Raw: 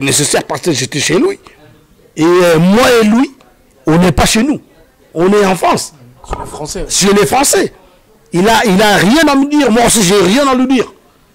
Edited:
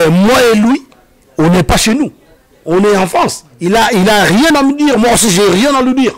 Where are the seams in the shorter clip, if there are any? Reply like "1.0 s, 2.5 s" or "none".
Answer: 3.5 s